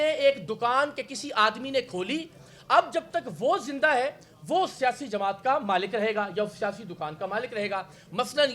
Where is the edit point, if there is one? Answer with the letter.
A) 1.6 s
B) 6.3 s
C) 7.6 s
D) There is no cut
D